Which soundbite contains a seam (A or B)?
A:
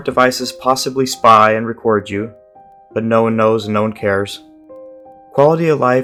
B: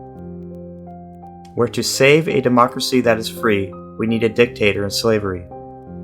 B